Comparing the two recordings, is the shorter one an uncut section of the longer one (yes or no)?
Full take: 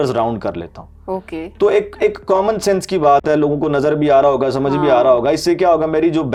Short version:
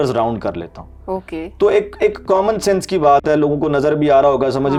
yes